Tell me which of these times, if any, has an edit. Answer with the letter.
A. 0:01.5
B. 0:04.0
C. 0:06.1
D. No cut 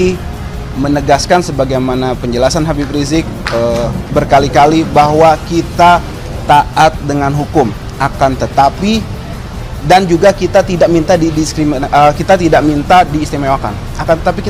D